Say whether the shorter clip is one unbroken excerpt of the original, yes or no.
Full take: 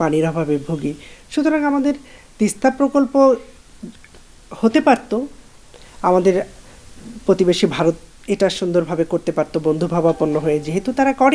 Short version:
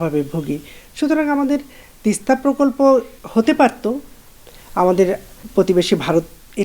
no